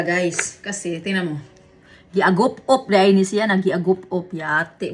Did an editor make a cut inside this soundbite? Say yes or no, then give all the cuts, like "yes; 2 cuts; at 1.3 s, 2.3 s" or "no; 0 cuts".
no; 0 cuts